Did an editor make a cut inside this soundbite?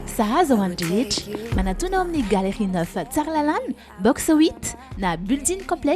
no; 0 cuts

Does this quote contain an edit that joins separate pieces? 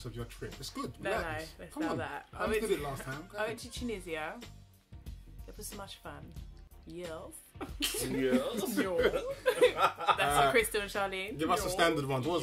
no; 0 cuts

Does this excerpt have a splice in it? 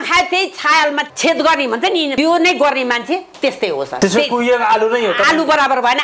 yes; 3 cuts; at 1.1 s, 2.1 s, 4.0 s

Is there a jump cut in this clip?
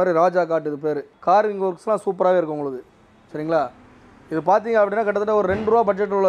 no; 0 cuts

